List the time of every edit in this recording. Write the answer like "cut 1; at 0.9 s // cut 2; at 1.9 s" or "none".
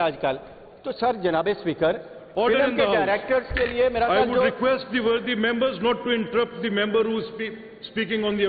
cut 1; at 2.2 s